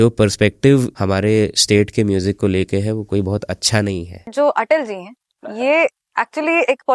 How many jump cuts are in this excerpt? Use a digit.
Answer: 2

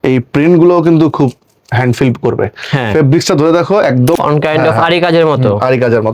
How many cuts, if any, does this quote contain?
1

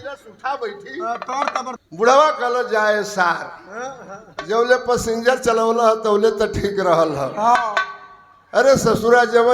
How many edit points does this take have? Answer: 1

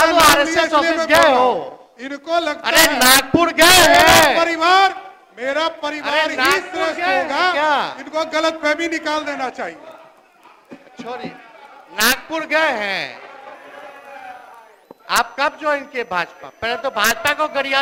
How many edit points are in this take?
0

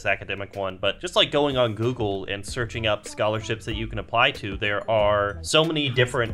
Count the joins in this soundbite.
2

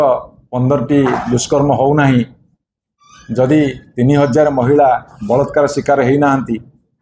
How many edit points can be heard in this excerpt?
0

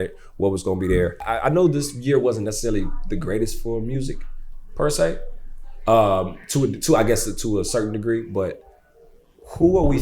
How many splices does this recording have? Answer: 1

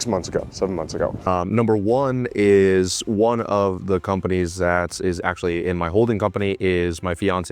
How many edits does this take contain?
1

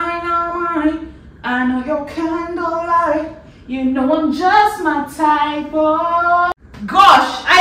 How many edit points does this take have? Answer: 1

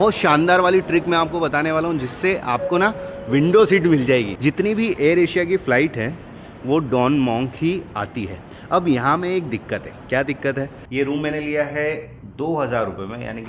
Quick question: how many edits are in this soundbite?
2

